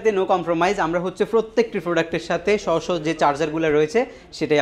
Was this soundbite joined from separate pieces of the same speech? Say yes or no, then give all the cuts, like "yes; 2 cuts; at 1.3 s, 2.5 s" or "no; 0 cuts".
no; 0 cuts